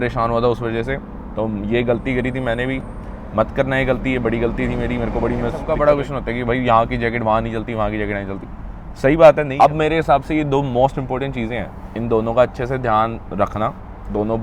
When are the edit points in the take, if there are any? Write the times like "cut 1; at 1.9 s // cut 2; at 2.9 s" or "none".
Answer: cut 1; at 5.6 s // cut 2; at 9.5 s